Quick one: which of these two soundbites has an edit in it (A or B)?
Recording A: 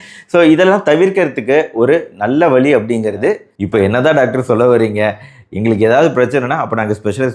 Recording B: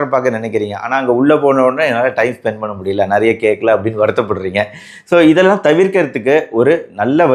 A